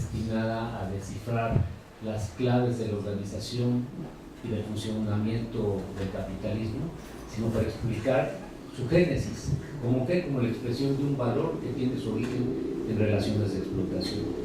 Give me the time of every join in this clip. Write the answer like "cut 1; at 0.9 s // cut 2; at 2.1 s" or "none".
none

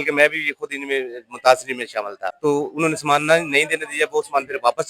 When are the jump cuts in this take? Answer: cut 1; at 2.3 s

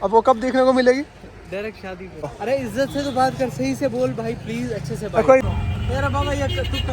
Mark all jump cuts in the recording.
cut 1; at 2.4 s // cut 2; at 5.4 s

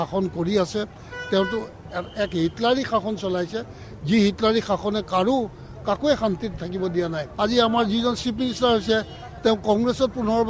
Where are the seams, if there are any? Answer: cut 1; at 7.2 s

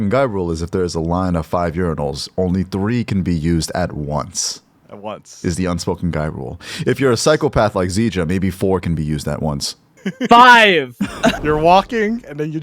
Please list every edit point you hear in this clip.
cut 1; at 11.4 s

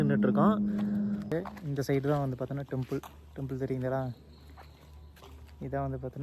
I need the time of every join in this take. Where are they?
cut 1; at 1.3 s

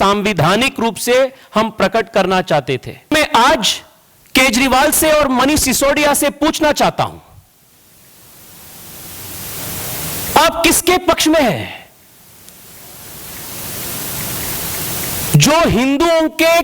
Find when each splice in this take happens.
cut 1; at 3.1 s

